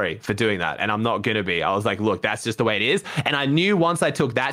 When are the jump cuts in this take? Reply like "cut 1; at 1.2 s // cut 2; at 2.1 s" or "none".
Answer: none